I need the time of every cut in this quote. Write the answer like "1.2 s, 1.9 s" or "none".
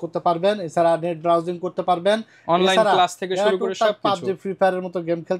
none